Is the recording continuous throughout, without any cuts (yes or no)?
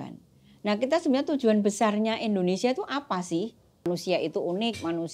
no